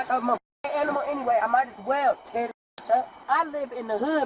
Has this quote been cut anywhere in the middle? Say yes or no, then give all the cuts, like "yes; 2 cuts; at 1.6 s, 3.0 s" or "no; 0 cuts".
yes; 1 cut; at 3.2 s